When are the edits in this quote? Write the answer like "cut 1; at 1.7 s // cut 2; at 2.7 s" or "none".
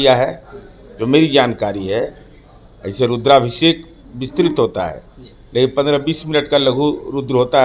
none